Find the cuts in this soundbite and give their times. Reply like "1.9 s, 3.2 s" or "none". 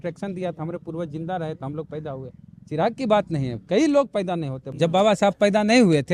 4.6 s